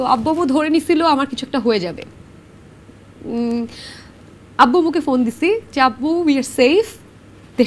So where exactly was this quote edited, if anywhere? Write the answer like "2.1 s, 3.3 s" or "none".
none